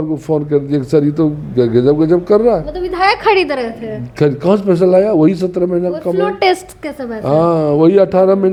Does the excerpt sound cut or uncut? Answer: uncut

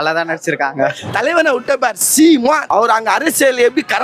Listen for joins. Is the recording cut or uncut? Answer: cut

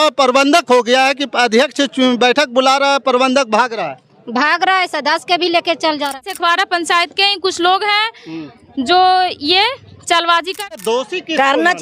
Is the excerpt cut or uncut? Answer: cut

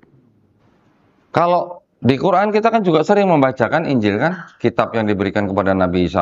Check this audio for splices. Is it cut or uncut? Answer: uncut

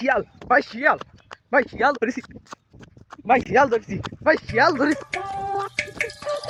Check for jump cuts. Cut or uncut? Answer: uncut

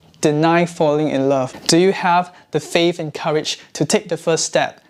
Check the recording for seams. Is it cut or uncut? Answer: cut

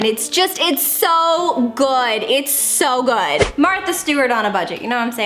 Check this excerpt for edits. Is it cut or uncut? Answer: cut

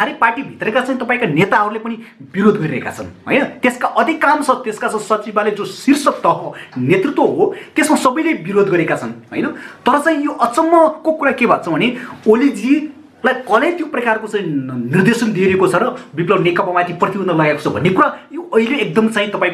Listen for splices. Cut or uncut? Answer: uncut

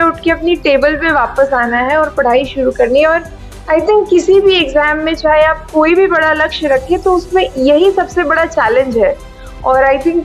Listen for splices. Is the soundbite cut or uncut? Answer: uncut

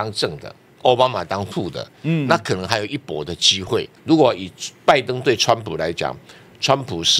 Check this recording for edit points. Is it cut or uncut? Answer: cut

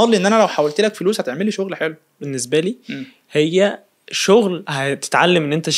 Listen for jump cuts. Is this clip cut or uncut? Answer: cut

